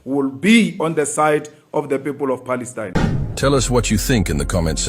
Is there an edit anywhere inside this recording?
yes; 1 cut; at 2.9 s

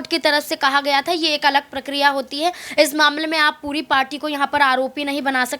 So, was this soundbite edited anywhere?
no; 0 cuts

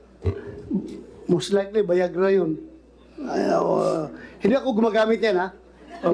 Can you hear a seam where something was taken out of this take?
no; 0 cuts

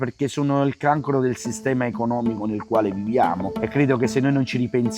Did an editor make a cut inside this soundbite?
yes; 1 cut; at 3.5 s

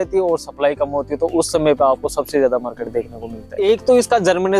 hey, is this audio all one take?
no; 1 cut; at 3.6 s

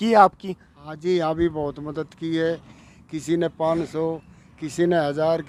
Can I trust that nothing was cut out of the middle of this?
yes; 0 cuts

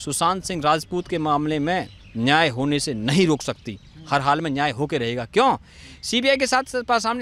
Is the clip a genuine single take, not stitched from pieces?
yes; 0 cuts

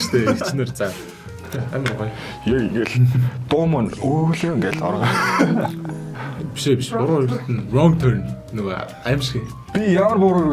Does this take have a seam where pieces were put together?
yes; 1 cut; at 1.4 s

